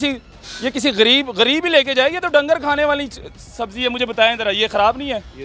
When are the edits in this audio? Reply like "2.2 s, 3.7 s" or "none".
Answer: none